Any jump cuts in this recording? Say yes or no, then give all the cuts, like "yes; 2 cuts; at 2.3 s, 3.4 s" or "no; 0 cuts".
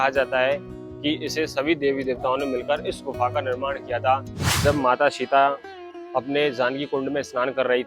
yes; 1 cut; at 4.4 s